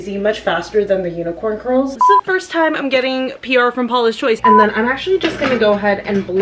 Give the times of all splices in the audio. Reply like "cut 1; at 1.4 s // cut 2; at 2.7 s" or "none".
cut 1; at 2.0 s // cut 2; at 4.4 s